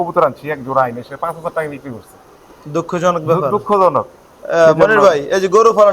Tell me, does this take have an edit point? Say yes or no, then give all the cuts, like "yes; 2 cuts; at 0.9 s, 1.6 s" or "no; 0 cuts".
no; 0 cuts